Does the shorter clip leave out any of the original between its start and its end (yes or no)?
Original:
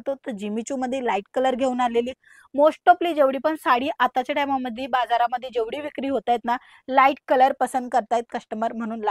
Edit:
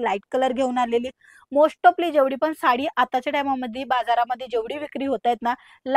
no